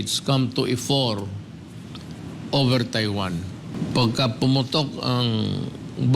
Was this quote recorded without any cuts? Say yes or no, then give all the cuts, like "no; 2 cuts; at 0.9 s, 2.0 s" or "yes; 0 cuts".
no; 1 cut; at 3.7 s